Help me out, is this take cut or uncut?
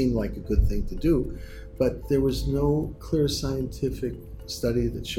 cut